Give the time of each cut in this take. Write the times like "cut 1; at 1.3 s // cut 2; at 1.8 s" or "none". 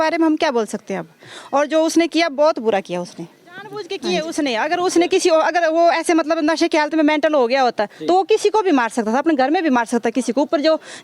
cut 1; at 3.9 s